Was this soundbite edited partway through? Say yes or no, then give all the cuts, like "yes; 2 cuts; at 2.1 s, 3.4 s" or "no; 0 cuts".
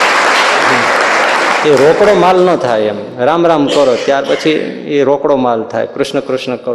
no; 0 cuts